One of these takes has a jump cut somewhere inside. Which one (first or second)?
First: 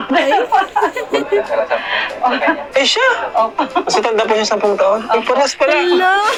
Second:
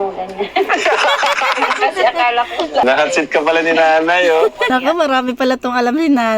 second